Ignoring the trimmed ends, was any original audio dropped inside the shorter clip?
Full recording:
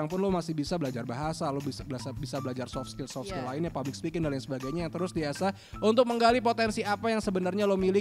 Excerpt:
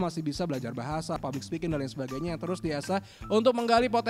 yes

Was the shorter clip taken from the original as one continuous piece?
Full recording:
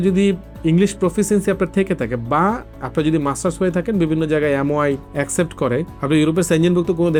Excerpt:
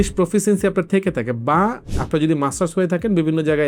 yes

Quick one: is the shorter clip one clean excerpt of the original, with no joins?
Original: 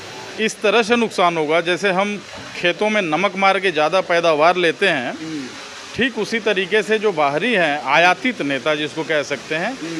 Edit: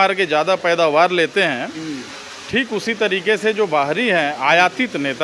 yes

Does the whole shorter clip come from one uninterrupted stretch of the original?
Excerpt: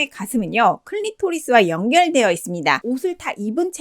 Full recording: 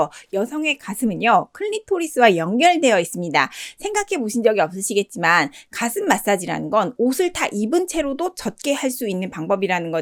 no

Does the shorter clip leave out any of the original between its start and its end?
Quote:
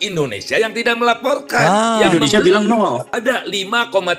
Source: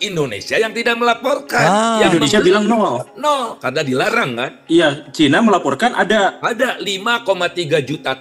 yes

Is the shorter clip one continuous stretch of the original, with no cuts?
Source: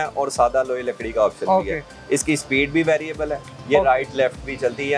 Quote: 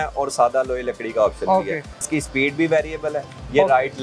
no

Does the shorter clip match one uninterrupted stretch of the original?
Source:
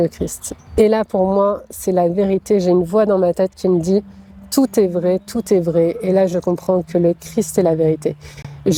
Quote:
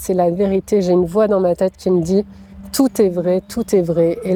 yes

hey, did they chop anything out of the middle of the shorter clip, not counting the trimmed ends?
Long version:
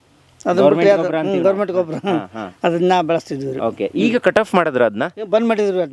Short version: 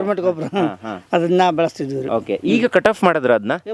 no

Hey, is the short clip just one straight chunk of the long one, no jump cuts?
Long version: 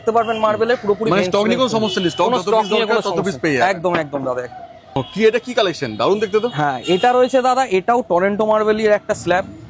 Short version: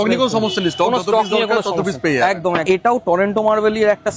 no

